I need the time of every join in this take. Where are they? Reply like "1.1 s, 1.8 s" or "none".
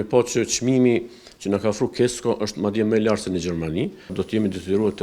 4.1 s